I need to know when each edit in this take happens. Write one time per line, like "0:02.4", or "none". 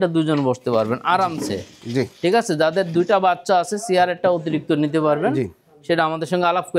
none